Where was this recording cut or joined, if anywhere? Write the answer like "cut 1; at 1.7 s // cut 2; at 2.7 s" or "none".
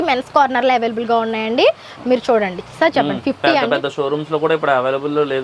none